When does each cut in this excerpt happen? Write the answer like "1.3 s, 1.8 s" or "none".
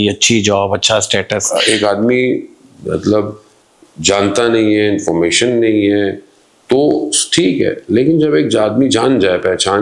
1.4 s